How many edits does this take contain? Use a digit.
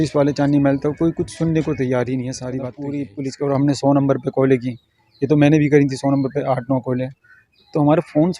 1